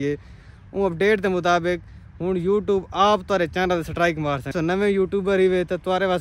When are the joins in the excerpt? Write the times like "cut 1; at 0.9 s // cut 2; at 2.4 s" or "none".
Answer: cut 1; at 4.5 s